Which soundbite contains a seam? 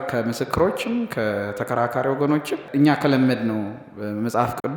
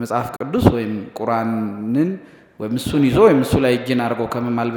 first; 1 cut; at 2.7 s

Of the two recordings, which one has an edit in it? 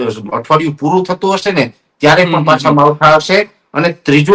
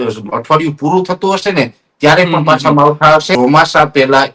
second; 1 cut; at 3.3 s

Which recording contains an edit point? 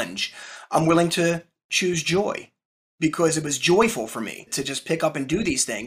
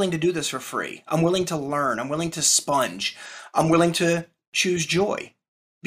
first; 1 cut; at 4.5 s

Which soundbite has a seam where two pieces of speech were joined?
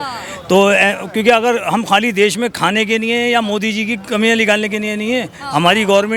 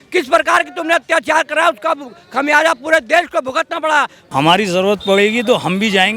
second; 1 cut; at 4.2 s

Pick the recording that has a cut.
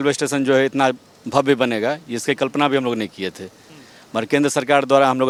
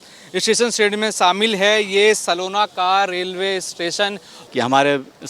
second; 1 cut; at 4.3 s

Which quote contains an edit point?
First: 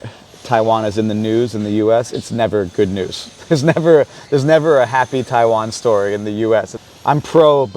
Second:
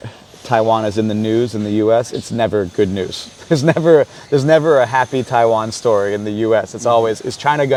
first; 1 cut; at 6.7 s

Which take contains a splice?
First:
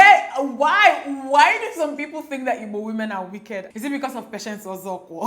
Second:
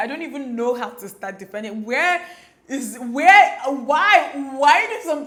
first; 1 cut; at 3.7 s

